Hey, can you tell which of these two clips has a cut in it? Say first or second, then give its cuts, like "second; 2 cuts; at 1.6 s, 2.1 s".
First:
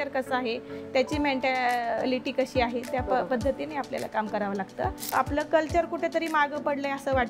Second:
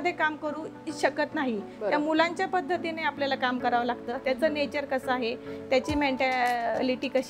first; 1 cut; at 5.0 s